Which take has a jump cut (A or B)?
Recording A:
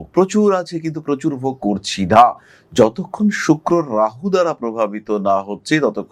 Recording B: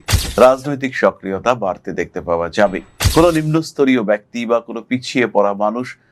B